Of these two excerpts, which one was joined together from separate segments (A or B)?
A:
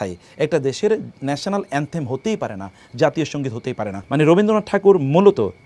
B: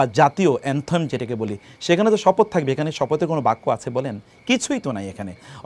A